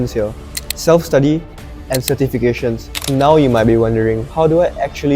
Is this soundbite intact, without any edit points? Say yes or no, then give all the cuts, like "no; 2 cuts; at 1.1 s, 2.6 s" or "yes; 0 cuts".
no; 1 cut; at 3.0 s